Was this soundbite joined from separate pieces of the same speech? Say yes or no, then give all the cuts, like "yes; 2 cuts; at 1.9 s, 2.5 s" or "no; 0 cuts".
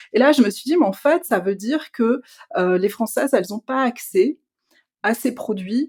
no; 0 cuts